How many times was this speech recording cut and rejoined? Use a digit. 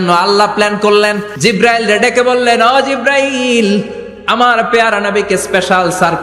1